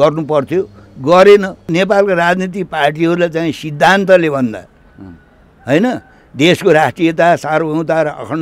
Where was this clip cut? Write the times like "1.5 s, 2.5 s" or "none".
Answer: 1.7 s